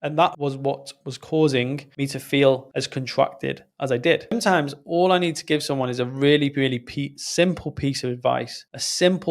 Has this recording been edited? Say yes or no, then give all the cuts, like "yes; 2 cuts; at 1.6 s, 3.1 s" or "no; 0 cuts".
yes; 1 cut; at 4.3 s